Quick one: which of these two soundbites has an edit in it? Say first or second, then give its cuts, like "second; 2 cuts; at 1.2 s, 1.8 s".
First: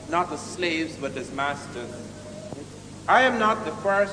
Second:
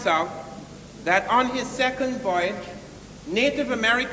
second; 1 cut; at 2.0 s